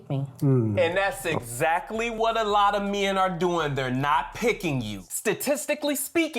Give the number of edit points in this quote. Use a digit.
1